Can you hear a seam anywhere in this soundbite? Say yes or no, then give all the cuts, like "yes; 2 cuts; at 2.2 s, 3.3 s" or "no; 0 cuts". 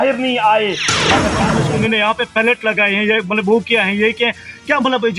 yes; 1 cut; at 1.3 s